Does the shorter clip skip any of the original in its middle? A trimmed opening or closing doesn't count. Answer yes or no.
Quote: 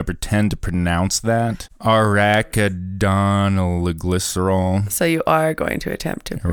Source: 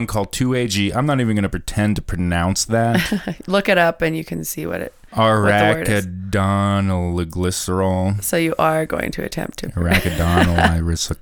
yes